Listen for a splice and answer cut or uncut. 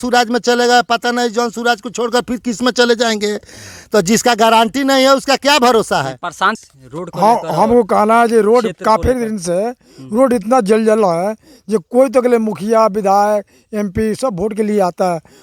uncut